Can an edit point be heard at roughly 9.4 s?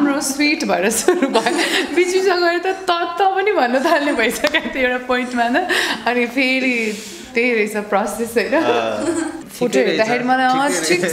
yes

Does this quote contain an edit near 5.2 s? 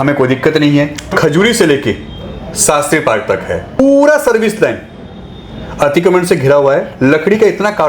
no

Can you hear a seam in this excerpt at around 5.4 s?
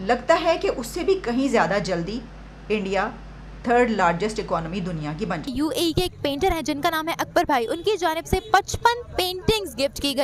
yes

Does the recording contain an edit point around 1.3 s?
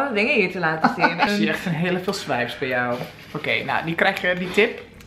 yes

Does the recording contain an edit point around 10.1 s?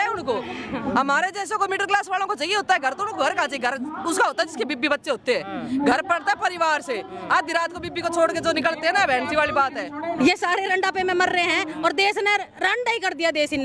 yes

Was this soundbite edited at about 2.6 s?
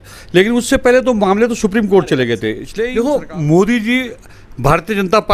yes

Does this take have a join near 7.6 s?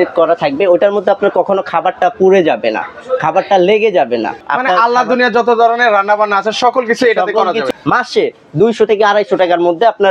yes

